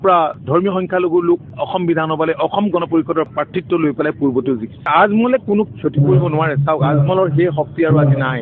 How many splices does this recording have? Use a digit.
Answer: 1